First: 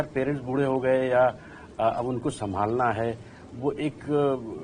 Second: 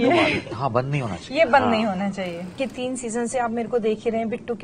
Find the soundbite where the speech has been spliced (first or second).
second